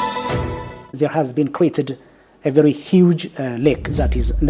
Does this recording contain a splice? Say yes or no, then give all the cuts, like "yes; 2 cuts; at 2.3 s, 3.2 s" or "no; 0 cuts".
yes; 1 cut; at 0.9 s